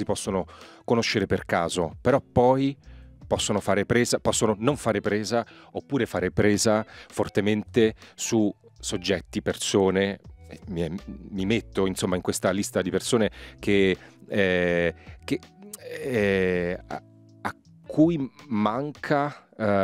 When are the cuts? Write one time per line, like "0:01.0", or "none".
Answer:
none